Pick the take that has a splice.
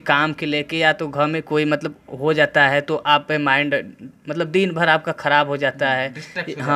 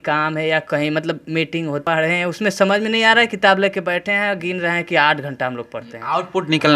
second; 1 cut; at 1.8 s

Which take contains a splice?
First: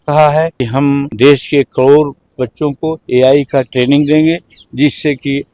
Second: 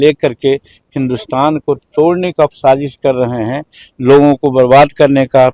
first; 2 cuts; at 0.8 s, 2.9 s

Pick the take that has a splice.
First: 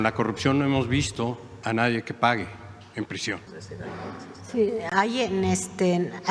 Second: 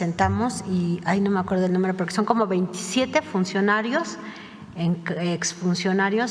first; 2 cuts; at 1.5 s, 3.5 s

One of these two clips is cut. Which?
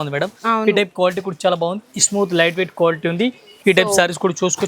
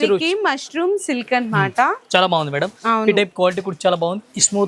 first; 1 cut; at 3.5 s

